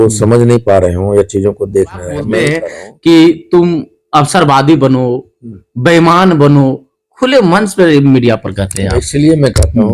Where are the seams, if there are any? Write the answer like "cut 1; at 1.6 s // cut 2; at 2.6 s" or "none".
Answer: cut 1; at 2.6 s